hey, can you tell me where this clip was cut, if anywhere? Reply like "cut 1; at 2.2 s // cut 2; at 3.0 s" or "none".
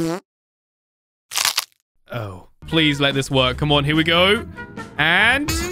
cut 1; at 2.5 s